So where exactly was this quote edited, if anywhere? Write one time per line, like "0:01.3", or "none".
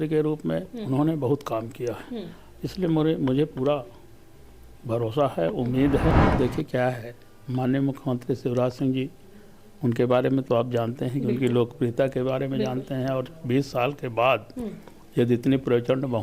0:06.2